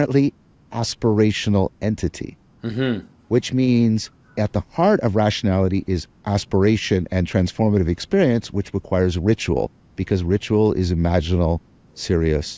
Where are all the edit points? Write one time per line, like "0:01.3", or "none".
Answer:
none